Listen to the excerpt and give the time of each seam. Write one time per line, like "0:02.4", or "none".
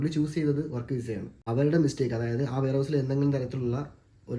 0:01.4